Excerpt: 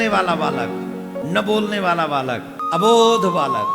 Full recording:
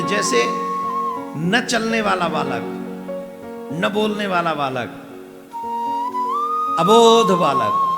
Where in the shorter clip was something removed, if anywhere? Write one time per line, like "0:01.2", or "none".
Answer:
0:01.2
0:02.5